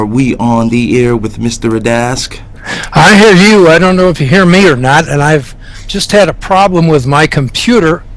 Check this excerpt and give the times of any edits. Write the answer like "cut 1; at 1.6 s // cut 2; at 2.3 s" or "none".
cut 1; at 1.1 s